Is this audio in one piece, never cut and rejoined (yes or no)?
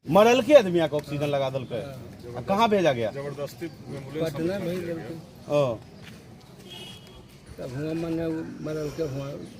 yes